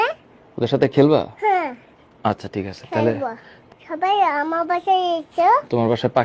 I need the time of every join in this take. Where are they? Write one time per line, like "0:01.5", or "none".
0:03.6